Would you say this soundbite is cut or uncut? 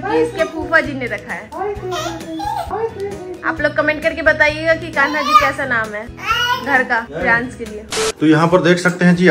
uncut